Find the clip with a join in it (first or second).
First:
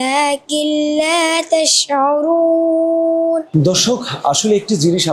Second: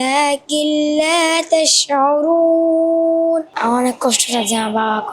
second